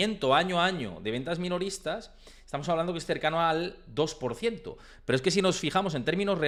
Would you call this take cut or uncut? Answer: uncut